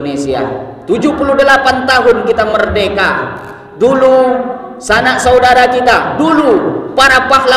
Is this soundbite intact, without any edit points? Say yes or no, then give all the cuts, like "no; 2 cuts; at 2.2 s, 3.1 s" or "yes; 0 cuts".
yes; 0 cuts